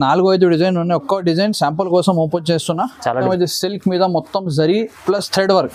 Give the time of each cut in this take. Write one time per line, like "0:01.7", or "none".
0:03.2